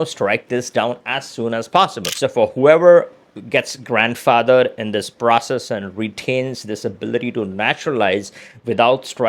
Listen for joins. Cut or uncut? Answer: uncut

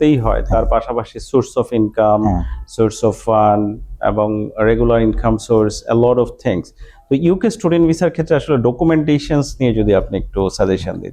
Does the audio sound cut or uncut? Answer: uncut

